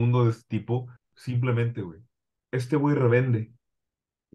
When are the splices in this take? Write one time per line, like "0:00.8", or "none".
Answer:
0:01.1